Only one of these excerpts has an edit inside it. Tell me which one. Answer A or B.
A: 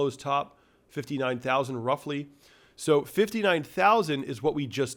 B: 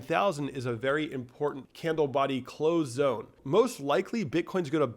B